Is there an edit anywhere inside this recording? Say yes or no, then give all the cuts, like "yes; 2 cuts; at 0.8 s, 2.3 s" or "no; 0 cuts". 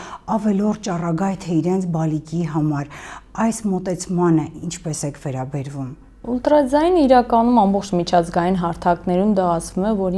no; 0 cuts